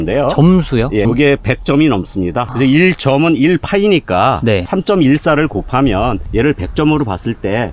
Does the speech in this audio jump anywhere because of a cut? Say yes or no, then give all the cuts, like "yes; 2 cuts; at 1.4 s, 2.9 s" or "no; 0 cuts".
no; 0 cuts